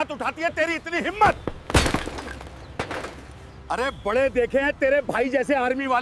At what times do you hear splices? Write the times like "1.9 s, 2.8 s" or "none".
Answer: 3.7 s